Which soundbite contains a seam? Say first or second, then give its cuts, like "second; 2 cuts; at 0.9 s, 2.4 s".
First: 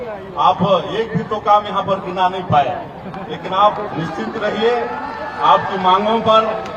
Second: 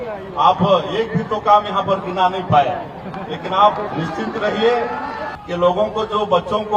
second; 1 cut; at 5.2 s